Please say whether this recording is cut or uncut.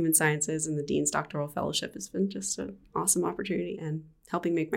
cut